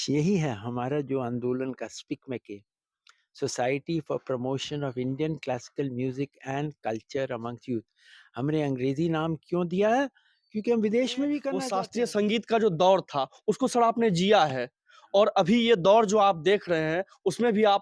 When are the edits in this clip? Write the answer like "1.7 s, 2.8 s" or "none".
11.6 s

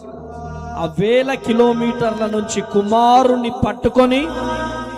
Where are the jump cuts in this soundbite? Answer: none

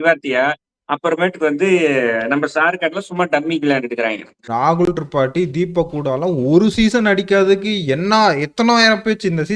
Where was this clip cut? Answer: 4.4 s

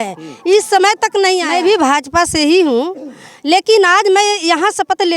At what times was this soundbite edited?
1.5 s

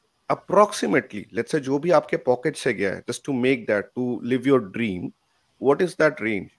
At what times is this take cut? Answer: none

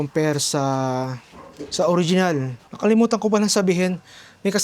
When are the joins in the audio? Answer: 2.6 s

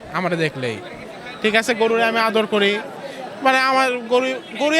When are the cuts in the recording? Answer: none

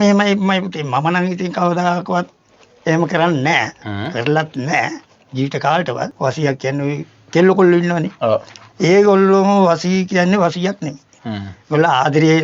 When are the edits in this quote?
6.1 s

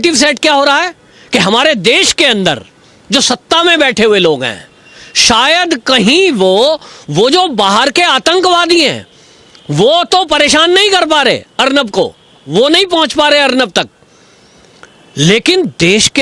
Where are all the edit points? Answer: none

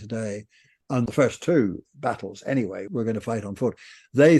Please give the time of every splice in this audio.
1.1 s, 2.9 s

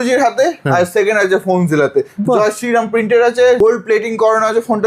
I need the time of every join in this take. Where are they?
3.6 s

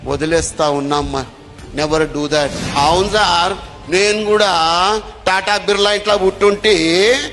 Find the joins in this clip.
2.6 s

